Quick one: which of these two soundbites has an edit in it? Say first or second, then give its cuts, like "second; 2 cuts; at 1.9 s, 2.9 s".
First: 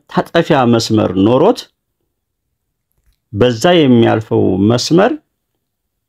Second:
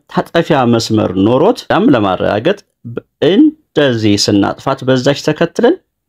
second; 1 cut; at 1.6 s